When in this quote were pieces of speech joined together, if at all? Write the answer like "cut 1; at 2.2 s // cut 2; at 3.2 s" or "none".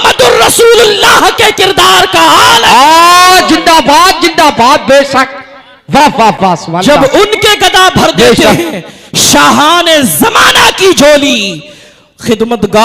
none